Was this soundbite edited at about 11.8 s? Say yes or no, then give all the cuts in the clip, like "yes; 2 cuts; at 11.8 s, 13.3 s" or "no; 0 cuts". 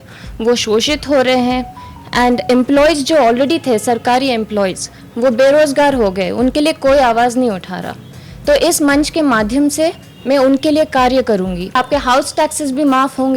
yes; 1 cut; at 11.8 s